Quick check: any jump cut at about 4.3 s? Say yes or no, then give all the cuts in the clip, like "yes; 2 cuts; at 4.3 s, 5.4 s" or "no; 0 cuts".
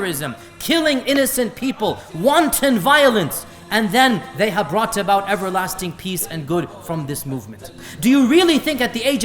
no; 1 cut; at 7.8 s